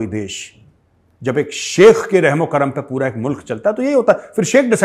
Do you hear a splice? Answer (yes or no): no